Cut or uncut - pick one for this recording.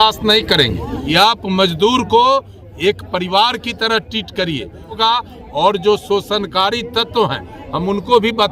cut